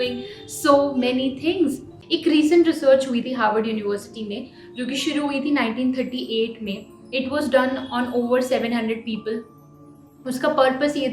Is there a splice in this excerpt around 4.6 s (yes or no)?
no